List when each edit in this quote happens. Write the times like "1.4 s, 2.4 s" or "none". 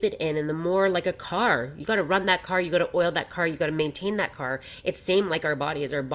none